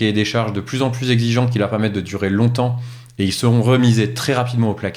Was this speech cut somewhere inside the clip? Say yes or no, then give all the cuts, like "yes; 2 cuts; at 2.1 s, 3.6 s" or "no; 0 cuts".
no; 0 cuts